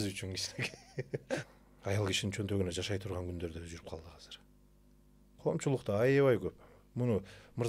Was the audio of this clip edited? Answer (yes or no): yes